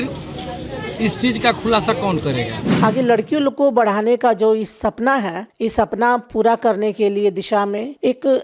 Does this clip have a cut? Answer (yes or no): yes